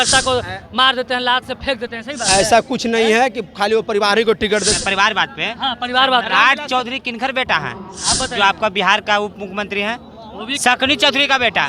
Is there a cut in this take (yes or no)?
yes